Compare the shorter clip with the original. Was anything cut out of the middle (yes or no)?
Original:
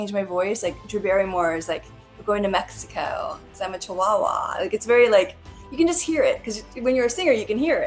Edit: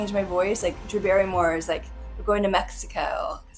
no